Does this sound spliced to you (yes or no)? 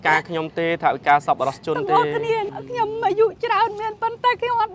yes